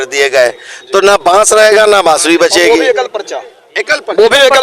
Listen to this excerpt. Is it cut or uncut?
uncut